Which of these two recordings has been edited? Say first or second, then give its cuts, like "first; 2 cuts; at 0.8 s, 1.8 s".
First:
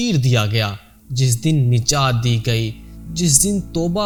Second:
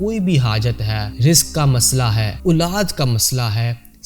second; 2 cuts; at 1.0 s, 2.3 s